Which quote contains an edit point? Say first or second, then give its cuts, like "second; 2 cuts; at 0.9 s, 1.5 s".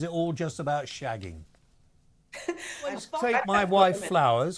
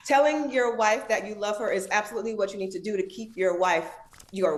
first; 1 cut; at 3.0 s